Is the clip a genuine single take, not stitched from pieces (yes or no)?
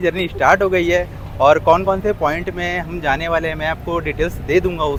yes